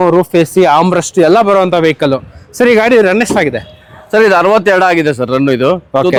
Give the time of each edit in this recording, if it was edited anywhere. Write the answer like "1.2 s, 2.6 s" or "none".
none